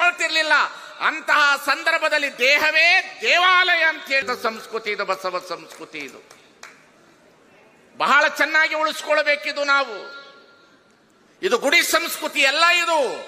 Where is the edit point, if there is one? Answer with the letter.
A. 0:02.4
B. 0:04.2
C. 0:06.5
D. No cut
B